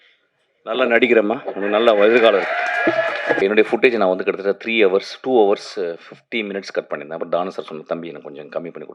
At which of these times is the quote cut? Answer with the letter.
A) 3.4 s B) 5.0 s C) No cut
A